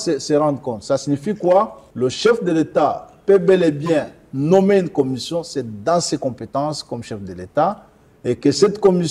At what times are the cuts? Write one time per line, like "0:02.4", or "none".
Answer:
0:01.8